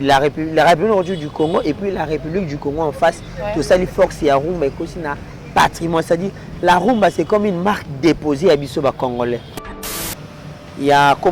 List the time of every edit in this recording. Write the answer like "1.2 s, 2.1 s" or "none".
10.0 s